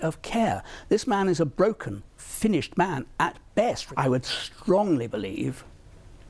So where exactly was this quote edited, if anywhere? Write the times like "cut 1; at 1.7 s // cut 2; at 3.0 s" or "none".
cut 1; at 3.8 s